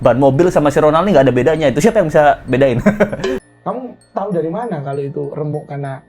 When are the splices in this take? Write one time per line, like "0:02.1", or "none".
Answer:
0:03.4